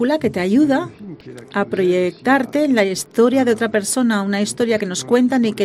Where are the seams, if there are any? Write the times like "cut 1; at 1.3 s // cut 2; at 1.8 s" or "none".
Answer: none